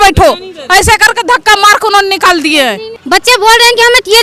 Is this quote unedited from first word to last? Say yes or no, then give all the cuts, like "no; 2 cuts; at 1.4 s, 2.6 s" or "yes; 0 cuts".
yes; 0 cuts